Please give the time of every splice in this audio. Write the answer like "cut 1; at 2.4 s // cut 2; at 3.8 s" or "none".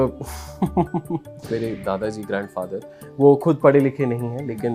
cut 1; at 1.5 s